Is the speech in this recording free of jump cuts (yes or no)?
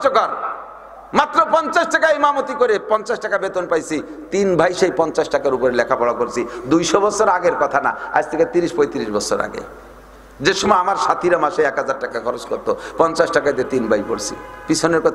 yes